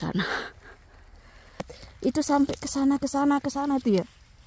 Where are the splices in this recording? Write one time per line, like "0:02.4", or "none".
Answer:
0:01.8